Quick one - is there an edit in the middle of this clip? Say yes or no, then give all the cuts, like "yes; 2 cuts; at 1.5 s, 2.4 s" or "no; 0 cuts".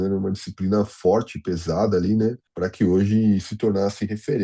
yes; 1 cut; at 2.5 s